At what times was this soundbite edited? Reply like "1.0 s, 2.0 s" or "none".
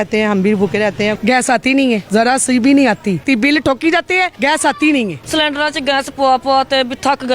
1.2 s, 2.0 s, 3.2 s, 4.3 s, 5.2 s